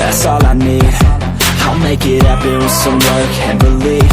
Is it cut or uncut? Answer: uncut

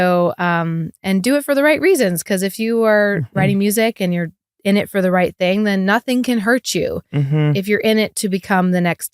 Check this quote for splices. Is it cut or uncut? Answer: uncut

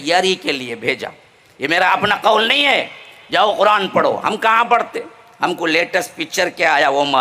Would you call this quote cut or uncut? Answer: uncut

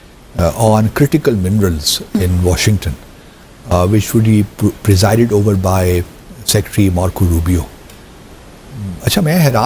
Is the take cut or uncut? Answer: uncut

